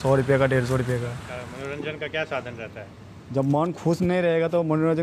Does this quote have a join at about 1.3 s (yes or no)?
yes